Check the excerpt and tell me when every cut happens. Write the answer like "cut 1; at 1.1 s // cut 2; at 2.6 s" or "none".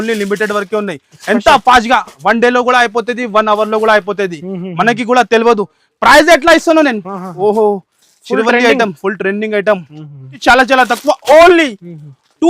cut 1; at 10.4 s